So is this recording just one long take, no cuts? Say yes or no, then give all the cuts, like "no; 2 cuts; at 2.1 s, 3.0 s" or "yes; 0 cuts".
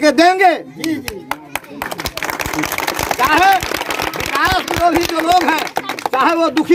yes; 0 cuts